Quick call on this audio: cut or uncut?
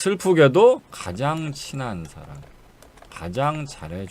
cut